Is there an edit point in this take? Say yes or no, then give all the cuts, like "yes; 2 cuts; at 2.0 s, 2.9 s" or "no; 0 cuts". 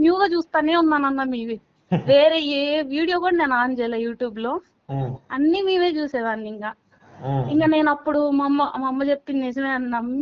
no; 0 cuts